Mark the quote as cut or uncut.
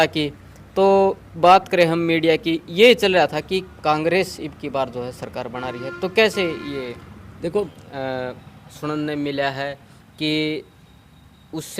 cut